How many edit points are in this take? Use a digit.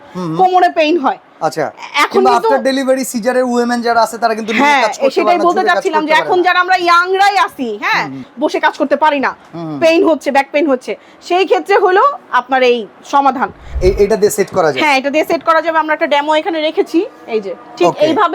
2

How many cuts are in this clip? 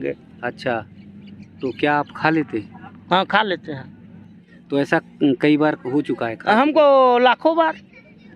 1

